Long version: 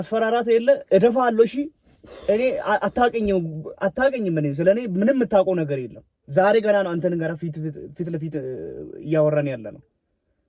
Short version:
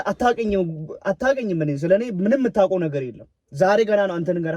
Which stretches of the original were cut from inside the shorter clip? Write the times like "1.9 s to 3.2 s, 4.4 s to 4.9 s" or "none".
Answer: none